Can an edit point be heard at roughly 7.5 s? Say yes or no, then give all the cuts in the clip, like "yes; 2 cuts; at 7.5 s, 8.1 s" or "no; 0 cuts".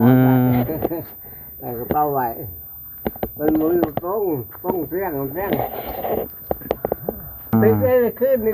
yes; 1 cut; at 7.5 s